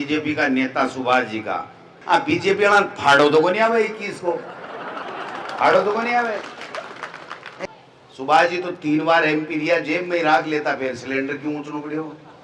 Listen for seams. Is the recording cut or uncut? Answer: cut